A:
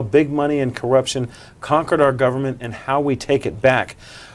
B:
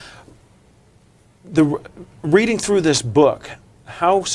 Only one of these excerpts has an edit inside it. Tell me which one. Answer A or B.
A